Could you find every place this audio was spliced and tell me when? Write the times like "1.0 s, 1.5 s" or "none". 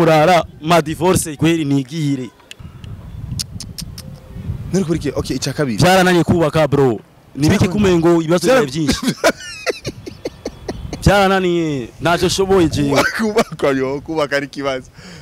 2.6 s